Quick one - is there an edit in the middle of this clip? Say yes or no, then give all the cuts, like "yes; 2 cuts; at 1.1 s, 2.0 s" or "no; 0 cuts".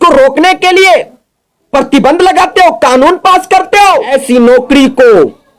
yes; 1 cut; at 4.1 s